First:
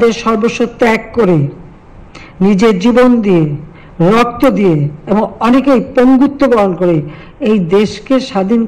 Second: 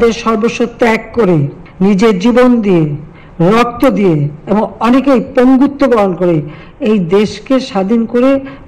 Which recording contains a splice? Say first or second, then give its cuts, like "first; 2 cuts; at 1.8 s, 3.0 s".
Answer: second; 1 cut; at 1.6 s